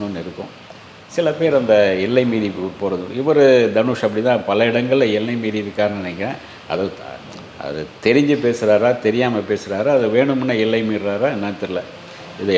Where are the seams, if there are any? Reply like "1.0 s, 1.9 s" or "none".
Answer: none